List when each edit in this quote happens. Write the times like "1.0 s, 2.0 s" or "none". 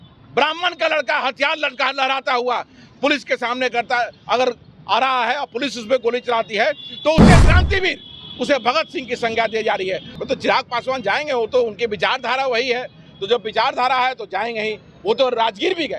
10.1 s